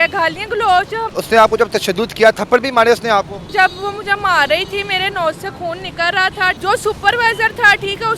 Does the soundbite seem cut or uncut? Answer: cut